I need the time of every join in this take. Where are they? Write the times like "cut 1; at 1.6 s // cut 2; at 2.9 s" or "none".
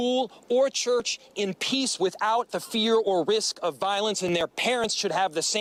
none